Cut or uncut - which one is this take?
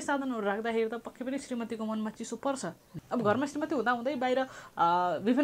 cut